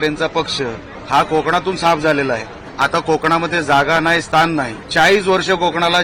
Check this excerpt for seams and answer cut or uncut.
cut